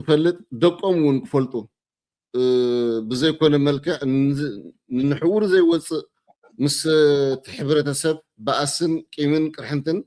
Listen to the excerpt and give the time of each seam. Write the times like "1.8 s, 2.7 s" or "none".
none

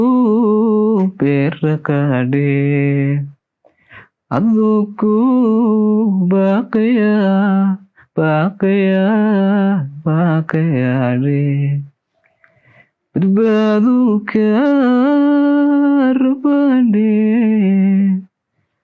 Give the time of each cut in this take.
none

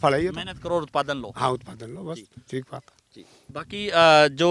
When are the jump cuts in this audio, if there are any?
none

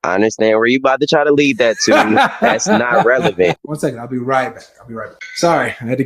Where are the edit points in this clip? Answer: 3.7 s, 5.2 s

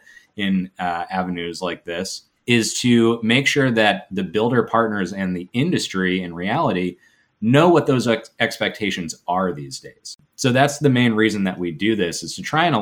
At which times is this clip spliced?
2.2 s, 10.2 s

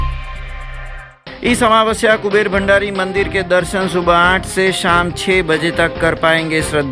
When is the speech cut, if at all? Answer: 1.1 s

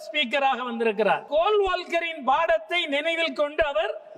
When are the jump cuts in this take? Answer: 1.2 s

